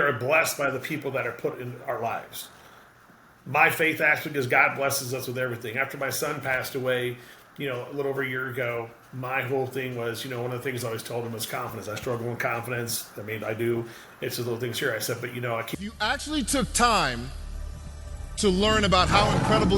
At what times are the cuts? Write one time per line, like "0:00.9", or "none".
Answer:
0:15.7